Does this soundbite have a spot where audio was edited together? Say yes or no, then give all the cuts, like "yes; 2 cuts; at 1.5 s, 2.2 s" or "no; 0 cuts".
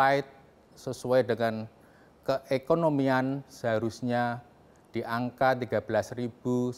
no; 0 cuts